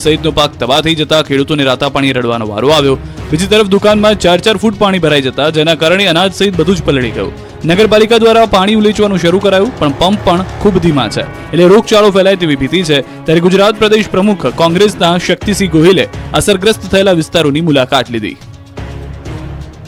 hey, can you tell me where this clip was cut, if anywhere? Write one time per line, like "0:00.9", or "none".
none